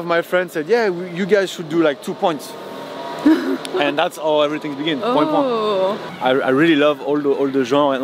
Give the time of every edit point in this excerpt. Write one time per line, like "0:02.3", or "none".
0:06.1